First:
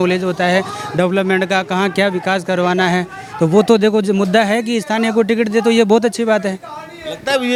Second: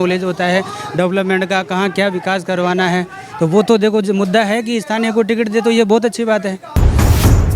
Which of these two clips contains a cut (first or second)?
second